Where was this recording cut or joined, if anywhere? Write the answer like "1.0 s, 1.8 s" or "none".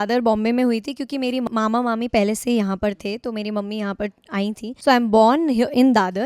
1.5 s, 4.7 s